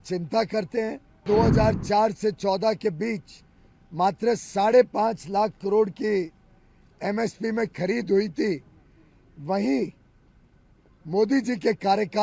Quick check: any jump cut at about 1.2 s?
yes; 1 cut; at 1.2 s

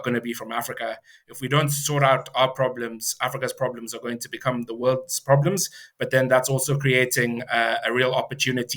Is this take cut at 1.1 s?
no; 0 cuts

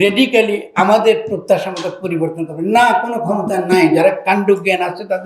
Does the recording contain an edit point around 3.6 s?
no; 0 cuts

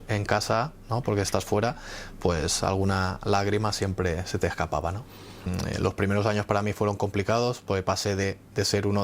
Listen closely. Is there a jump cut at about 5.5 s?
yes; 1 cut; at 5.5 s

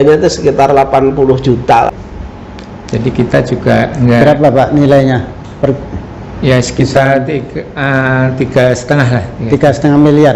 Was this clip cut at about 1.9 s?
yes; 1 cut; at 1.9 s

